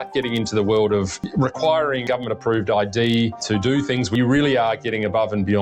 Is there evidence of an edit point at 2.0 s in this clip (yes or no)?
yes